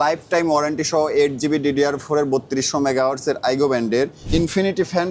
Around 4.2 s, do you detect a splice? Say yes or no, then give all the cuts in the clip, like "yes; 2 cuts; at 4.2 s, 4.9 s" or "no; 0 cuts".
yes; 1 cut; at 4.2 s